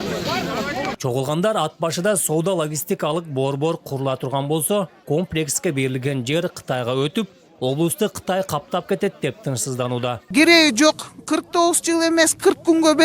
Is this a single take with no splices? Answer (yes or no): no